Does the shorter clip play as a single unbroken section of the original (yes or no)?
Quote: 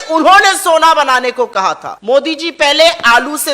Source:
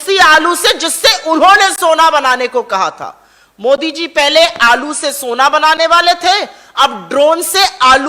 no